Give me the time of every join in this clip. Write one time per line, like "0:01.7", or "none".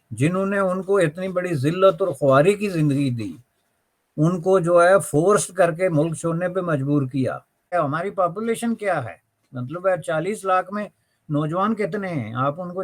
0:07.7